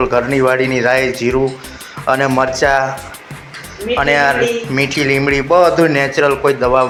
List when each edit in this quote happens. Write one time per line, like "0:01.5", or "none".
none